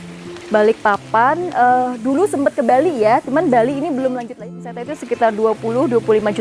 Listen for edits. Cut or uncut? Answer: cut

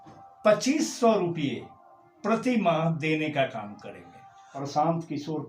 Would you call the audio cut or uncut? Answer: cut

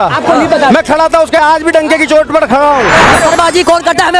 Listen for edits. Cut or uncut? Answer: cut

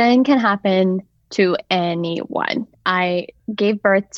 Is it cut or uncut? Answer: cut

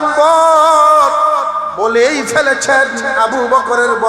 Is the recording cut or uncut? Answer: cut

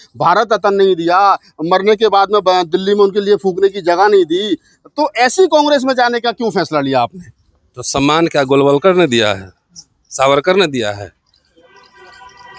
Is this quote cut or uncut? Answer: uncut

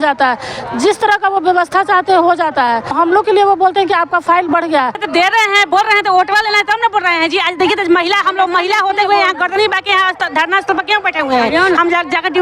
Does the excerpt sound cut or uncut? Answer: cut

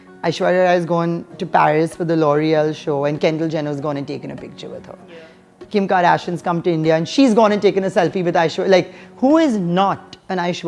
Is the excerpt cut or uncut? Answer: uncut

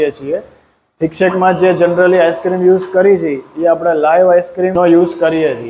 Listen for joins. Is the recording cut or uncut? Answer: cut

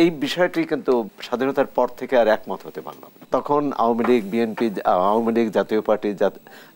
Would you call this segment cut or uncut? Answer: cut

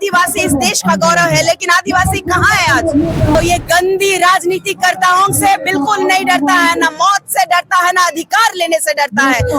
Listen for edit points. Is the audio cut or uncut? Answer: cut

